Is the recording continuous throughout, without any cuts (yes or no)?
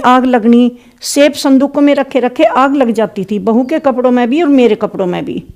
yes